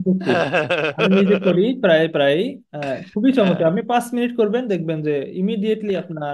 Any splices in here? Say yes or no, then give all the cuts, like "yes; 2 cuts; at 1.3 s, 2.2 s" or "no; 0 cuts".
no; 0 cuts